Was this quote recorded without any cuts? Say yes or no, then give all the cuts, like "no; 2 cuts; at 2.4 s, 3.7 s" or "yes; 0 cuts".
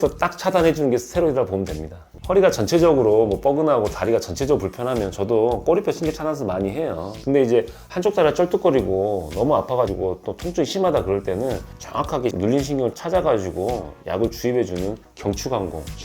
no; 1 cut; at 2.0 s